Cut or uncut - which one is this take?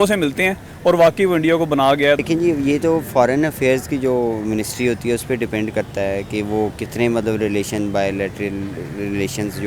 cut